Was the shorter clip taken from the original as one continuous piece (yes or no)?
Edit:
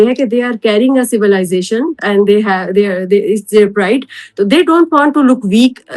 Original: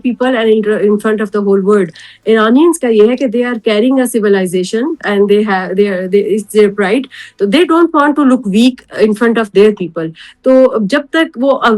yes